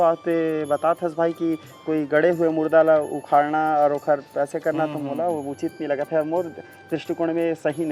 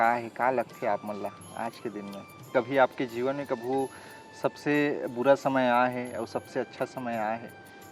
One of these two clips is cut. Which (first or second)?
second